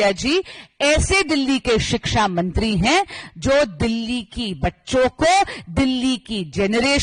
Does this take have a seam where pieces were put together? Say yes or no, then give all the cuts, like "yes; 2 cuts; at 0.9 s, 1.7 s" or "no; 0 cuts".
no; 0 cuts